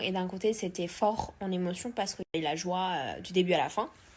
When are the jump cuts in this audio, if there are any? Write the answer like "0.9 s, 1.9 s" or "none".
2.2 s